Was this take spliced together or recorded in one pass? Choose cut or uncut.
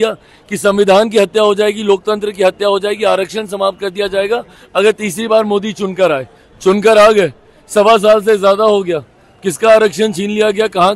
uncut